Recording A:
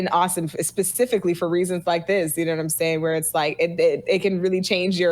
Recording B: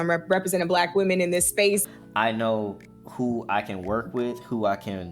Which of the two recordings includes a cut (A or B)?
B